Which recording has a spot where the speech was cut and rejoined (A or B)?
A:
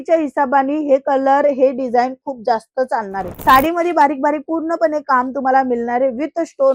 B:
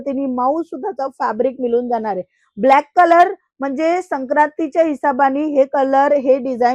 A